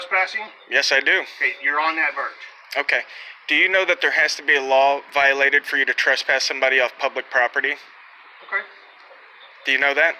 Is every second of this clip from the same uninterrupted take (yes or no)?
yes